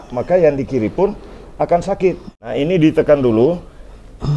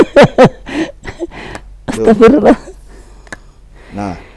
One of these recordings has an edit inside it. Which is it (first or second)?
first